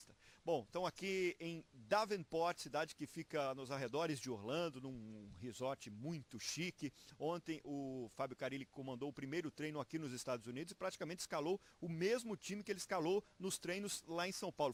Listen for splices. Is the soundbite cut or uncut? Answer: uncut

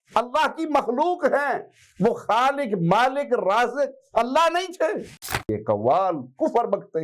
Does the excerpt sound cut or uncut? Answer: cut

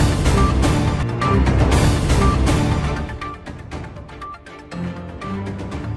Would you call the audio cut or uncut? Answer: cut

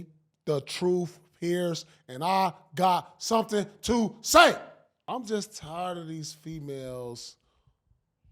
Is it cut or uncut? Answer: cut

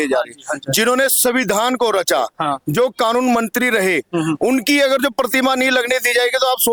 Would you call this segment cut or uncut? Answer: uncut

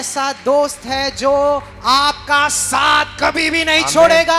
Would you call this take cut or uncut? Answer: uncut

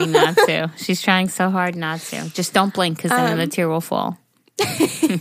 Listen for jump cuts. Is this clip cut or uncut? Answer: uncut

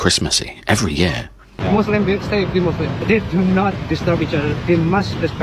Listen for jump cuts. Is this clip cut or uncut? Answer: cut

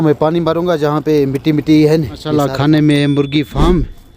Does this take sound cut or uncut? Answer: cut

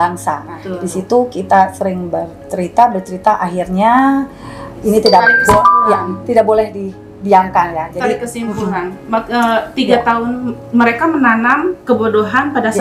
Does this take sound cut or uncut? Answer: uncut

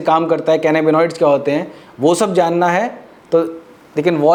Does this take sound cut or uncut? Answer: uncut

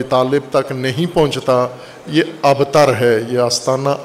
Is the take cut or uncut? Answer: uncut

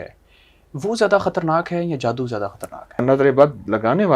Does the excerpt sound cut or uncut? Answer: cut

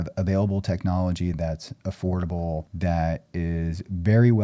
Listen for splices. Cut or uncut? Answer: cut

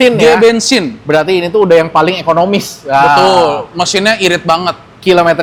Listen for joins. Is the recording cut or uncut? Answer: uncut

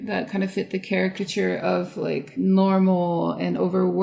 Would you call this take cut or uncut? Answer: cut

